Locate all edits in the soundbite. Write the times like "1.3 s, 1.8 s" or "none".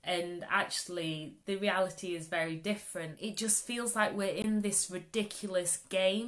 3.2 s